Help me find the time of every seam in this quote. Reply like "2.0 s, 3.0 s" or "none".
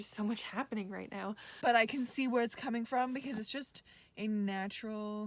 1.4 s